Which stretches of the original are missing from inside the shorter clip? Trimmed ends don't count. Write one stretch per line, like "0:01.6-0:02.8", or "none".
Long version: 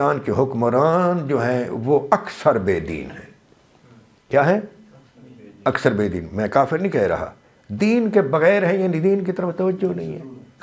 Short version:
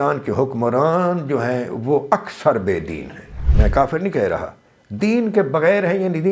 0:03.5-0:06.2